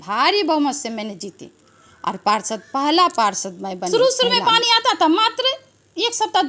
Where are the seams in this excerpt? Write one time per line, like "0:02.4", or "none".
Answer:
0:03.9

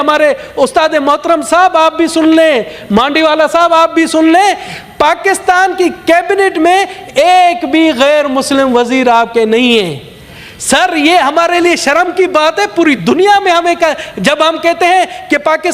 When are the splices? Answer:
none

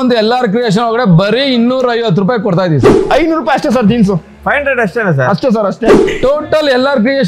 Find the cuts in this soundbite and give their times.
0:02.9
0:06.1

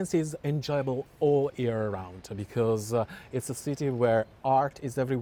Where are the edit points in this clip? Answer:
none

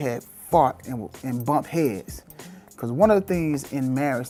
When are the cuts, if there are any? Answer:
none

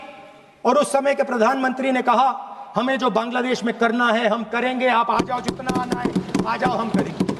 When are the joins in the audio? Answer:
none

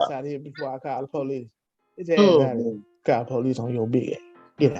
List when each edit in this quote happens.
none

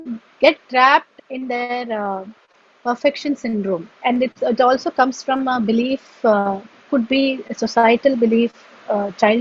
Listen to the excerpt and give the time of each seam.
0:01.1
0:03.9

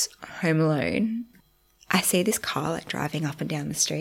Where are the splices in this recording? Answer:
0:01.4

